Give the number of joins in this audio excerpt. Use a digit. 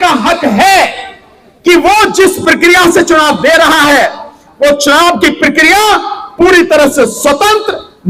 0